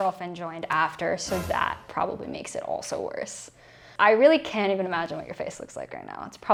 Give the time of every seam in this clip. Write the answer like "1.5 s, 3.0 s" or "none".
none